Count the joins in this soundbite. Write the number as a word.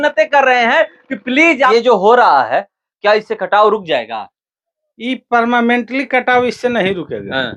one